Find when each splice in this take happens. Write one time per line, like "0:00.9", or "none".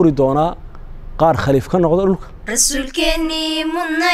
0:02.3